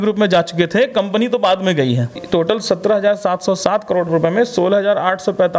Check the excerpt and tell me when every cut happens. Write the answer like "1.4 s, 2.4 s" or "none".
2.2 s